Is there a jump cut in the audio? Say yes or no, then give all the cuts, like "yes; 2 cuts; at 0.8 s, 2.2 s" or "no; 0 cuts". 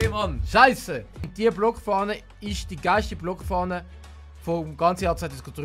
yes; 1 cut; at 1.2 s